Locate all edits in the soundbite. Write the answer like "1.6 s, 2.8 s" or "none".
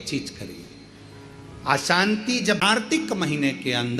2.8 s